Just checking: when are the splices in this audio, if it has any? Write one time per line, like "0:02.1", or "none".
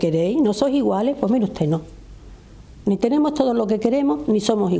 none